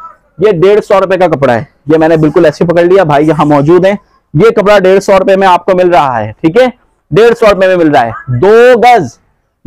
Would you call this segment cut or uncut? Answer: uncut